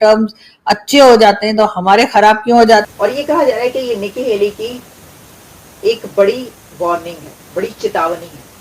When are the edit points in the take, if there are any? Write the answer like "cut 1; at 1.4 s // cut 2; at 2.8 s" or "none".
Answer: cut 1; at 2.9 s